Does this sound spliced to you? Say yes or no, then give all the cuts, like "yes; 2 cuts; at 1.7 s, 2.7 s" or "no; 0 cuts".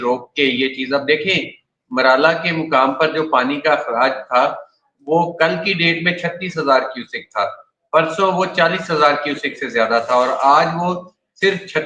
no; 0 cuts